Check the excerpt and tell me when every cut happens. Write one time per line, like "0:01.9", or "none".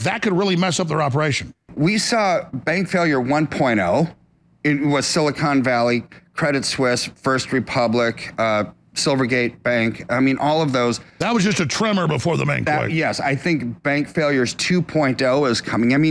0:01.7